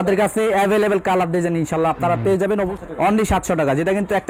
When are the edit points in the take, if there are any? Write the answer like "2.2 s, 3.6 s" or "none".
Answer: 2.8 s